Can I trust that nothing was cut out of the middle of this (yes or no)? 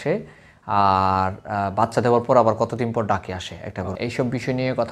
no